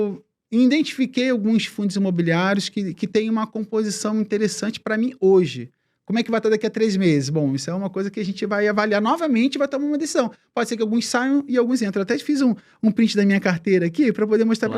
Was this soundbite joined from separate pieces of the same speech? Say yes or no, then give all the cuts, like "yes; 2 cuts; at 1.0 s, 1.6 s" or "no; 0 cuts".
no; 0 cuts